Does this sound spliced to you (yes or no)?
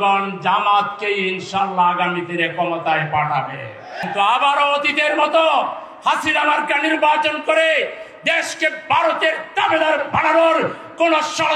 yes